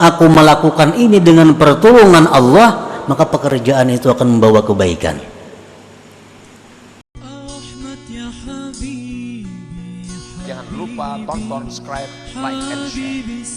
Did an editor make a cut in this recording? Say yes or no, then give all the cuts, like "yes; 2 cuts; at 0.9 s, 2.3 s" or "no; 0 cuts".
yes; 1 cut; at 7.1 s